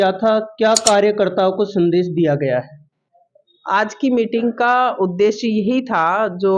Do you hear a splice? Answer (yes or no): no